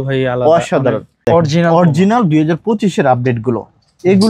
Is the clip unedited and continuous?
no; 1 cut; at 1.2 s

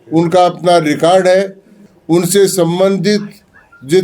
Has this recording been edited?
yes; 1 cut; at 1.8 s

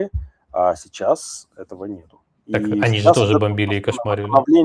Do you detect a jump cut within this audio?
no; 0 cuts

